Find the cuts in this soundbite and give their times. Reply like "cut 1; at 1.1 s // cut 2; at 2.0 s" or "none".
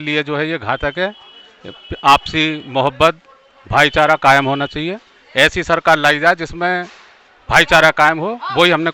none